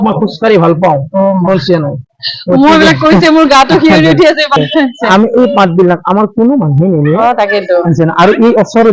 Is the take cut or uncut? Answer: cut